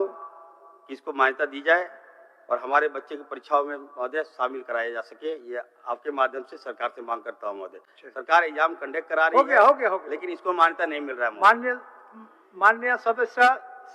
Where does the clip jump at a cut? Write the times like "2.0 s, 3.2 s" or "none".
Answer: none